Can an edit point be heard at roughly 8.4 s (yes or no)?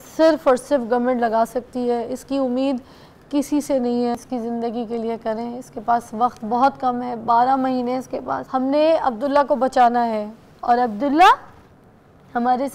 yes